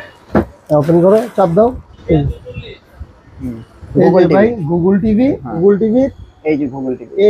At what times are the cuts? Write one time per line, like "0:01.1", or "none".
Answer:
0:01.9
0:05.5